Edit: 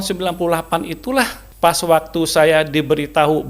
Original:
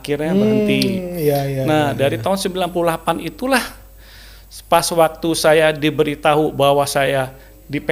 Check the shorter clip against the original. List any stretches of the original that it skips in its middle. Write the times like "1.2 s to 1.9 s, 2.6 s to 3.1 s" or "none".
3.8 s to 4.5 s